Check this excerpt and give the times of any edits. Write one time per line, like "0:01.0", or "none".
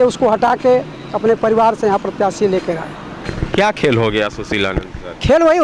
none